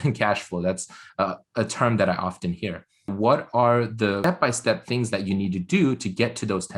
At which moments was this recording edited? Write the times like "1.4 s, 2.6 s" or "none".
3.1 s, 4.2 s